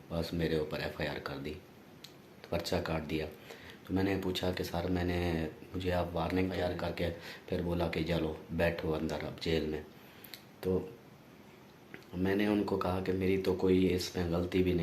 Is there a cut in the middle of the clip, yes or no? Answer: yes